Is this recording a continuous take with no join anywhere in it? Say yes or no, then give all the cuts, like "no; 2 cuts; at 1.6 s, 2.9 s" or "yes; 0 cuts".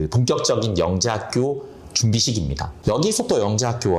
no; 1 cut; at 2.7 s